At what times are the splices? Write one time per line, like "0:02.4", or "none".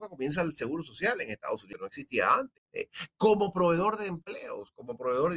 0:01.7
0:03.0